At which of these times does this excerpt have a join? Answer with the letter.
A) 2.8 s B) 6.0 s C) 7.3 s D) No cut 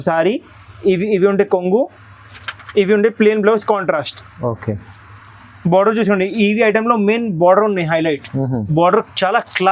D